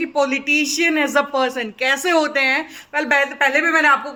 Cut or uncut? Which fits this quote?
uncut